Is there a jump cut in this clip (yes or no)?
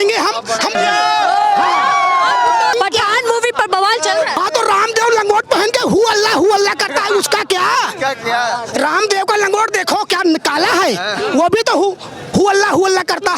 yes